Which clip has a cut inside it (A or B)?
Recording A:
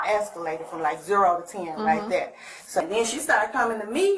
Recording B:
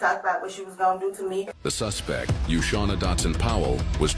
A